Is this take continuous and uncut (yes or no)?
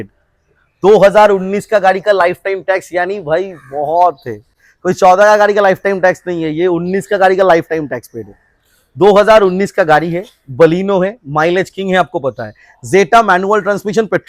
yes